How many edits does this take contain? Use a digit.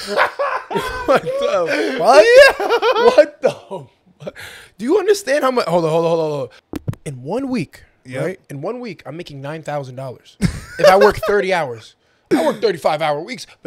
1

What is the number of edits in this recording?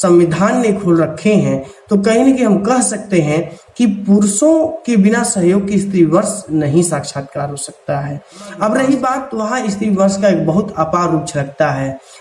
1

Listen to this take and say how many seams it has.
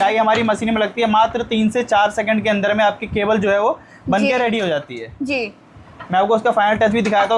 0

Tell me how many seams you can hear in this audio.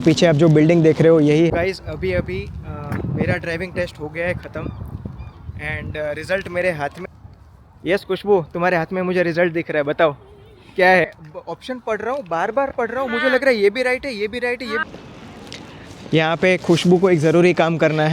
4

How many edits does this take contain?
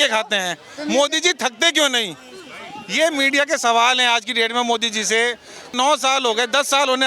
1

